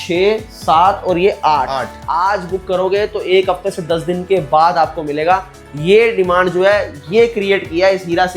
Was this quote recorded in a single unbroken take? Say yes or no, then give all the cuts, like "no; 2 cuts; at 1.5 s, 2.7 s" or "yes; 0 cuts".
no; 1 cut; at 1.9 s